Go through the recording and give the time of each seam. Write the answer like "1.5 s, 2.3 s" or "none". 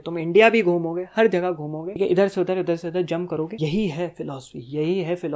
2.0 s, 3.5 s